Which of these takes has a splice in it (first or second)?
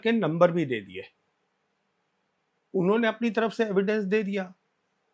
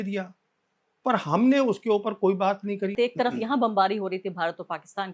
second